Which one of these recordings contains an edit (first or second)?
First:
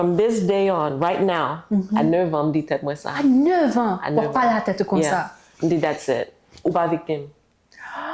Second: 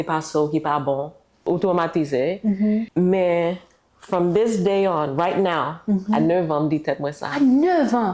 second